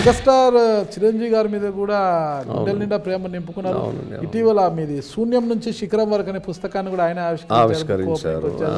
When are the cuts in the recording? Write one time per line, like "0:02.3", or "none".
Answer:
none